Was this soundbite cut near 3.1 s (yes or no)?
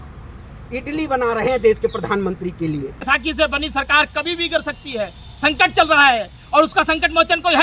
yes